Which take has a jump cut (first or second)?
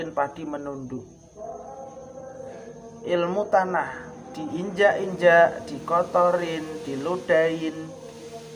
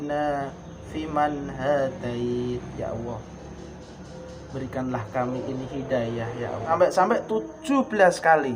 second